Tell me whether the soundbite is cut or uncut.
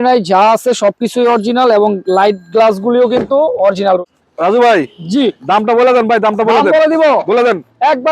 cut